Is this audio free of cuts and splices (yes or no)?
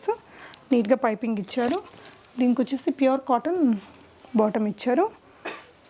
yes